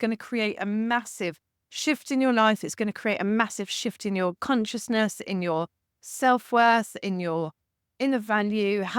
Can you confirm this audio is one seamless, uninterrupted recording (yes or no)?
yes